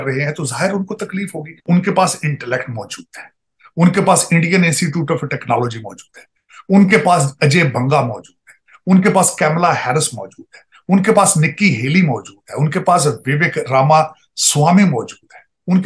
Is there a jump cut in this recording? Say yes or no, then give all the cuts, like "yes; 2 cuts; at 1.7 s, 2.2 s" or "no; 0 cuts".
yes; 1 cut; at 1.6 s